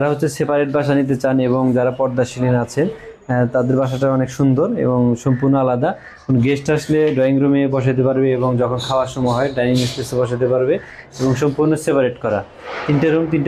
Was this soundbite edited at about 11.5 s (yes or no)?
no